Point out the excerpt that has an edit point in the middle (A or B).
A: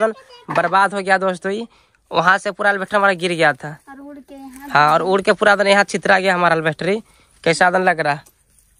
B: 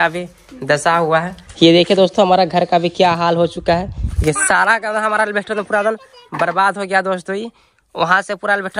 B